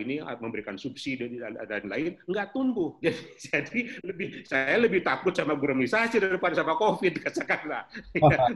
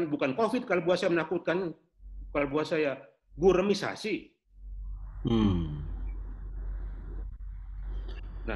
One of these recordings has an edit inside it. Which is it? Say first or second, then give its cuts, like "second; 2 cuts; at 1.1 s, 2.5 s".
first; 1 cut; at 3.0 s